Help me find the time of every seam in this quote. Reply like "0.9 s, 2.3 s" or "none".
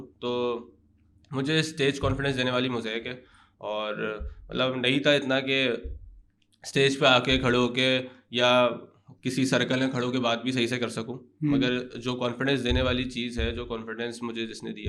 none